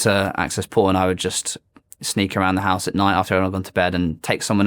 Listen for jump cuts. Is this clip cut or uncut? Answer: uncut